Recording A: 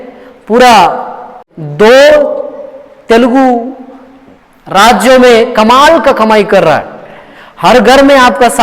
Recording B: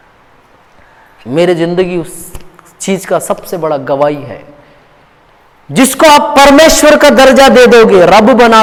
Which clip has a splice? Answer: A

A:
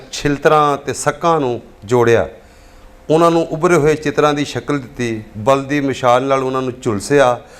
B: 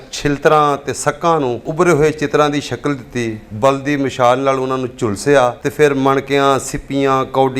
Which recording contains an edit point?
B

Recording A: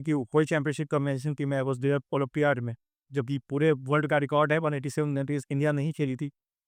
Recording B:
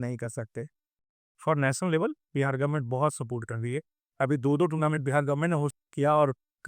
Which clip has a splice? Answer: B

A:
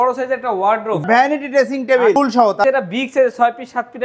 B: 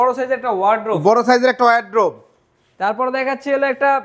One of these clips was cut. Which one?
A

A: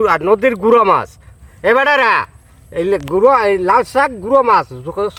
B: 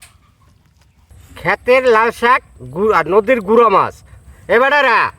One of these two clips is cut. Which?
B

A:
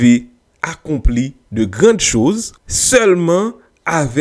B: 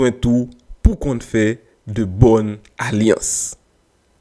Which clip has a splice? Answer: A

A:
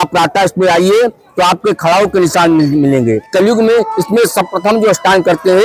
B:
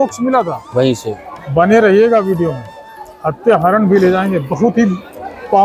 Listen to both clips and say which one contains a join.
A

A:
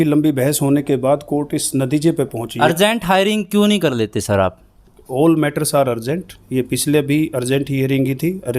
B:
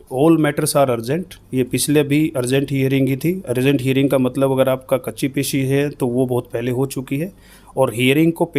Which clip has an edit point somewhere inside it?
A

